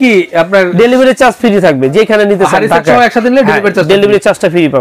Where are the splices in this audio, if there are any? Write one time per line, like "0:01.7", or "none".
none